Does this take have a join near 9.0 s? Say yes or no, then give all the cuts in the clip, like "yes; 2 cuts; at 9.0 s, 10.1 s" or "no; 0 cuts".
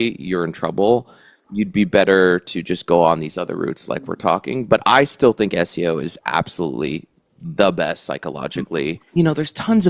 yes; 1 cut; at 9.0 s